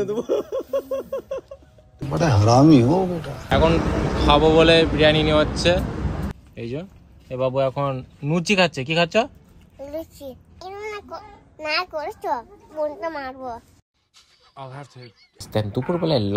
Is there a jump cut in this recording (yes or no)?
yes